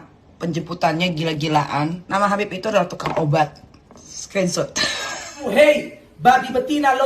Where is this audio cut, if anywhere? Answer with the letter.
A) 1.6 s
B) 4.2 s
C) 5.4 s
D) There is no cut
C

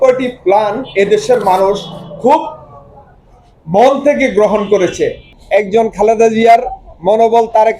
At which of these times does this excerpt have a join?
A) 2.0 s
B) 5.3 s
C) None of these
B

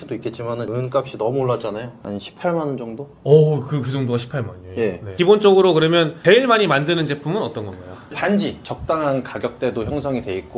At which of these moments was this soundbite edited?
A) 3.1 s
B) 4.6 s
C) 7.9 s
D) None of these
D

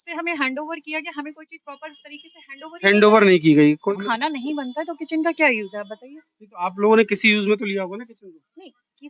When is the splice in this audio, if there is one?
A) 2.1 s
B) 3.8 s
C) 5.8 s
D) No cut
B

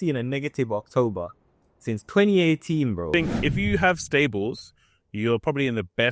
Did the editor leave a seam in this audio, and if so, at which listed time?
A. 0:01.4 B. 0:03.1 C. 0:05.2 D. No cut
B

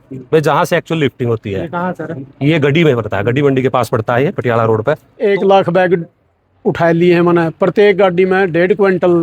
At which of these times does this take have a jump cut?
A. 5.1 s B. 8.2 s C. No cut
A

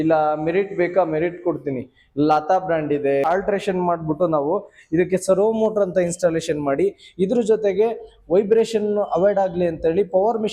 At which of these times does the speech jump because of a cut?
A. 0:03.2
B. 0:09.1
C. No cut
A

